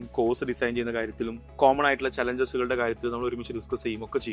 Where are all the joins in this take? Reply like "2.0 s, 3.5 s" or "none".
1.4 s